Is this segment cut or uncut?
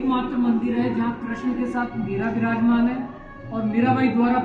uncut